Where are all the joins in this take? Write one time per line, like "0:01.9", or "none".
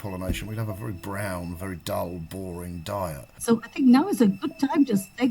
0:03.3